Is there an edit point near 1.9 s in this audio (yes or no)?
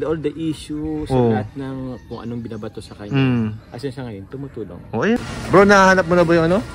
no